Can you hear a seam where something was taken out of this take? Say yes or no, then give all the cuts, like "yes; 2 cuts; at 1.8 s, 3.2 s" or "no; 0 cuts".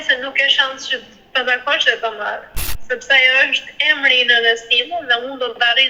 no; 0 cuts